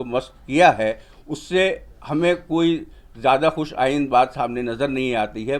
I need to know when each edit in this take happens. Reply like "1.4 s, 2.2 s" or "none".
none